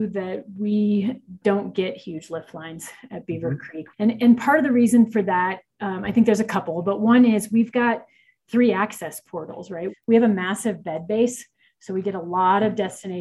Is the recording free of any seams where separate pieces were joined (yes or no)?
no